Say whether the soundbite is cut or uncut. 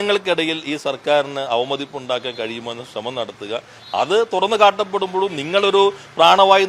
uncut